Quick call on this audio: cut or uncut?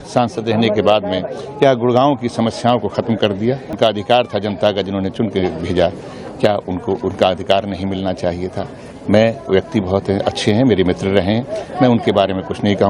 cut